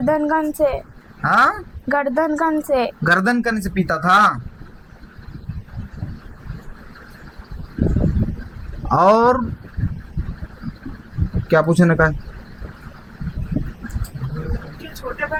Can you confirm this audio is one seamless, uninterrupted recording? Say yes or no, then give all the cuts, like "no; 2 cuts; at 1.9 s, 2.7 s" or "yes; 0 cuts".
yes; 0 cuts